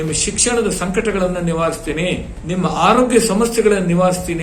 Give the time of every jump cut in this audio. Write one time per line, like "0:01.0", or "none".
0:02.3